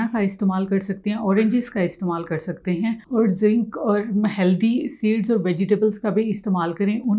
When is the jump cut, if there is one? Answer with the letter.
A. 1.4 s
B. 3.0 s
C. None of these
B